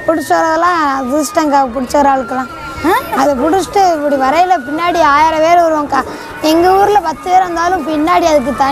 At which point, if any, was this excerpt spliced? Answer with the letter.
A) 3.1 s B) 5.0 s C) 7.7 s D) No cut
A